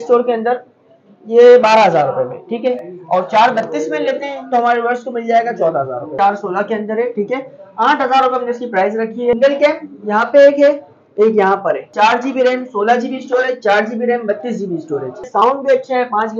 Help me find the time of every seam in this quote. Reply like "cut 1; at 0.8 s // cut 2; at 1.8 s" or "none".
cut 1; at 6.1 s // cut 2; at 9.3 s // cut 3; at 11.9 s // cut 4; at 15.3 s